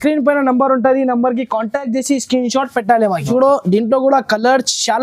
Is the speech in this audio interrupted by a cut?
yes; 1 cut; at 3.3 s

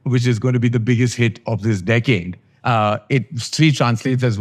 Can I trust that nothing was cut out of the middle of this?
yes; 0 cuts

